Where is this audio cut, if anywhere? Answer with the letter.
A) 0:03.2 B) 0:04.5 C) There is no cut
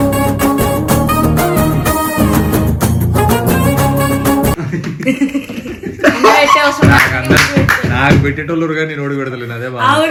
C